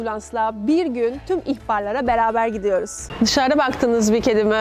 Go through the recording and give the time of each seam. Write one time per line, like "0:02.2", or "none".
0:03.0